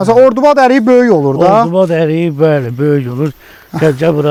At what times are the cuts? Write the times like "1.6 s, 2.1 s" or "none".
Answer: none